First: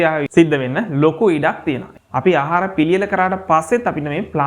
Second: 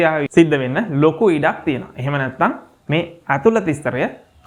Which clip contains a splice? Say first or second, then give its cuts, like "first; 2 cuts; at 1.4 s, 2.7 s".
first; 1 cut; at 1.9 s